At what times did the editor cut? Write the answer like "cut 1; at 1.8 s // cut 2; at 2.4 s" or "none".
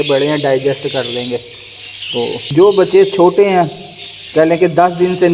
cut 1; at 2.5 s